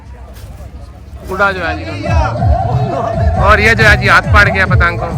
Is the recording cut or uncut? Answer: cut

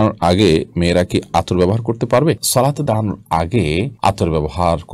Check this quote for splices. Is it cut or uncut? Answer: uncut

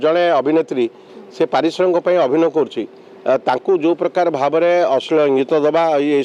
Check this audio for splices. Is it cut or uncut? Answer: uncut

